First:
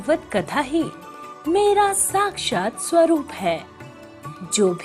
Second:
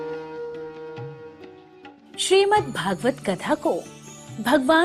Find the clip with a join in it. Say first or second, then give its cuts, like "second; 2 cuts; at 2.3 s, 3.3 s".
second; 1 cut; at 2.0 s